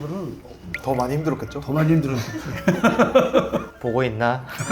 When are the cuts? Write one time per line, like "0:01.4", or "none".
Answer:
0:03.7